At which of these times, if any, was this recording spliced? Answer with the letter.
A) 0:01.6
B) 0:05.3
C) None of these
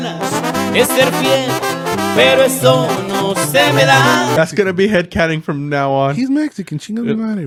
C